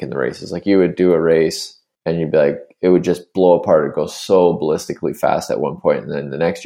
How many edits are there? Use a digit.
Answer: 0